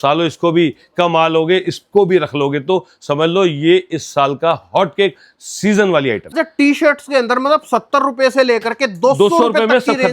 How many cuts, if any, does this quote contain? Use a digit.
1